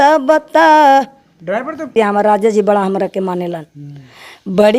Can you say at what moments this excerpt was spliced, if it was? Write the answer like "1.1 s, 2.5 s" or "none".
1.9 s